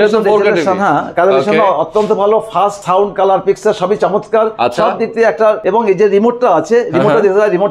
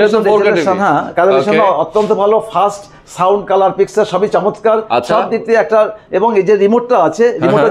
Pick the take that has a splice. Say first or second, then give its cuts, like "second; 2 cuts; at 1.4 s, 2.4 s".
first; 2 cuts; at 2.8 s, 5.6 s